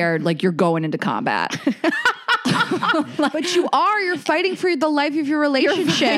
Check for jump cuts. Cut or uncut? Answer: uncut